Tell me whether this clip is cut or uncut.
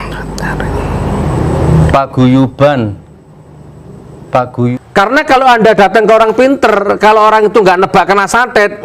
cut